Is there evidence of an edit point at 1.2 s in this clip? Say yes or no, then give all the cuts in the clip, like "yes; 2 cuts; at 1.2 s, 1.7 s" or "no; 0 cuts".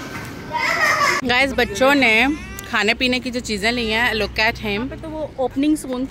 yes; 2 cuts; at 1.2 s, 5.0 s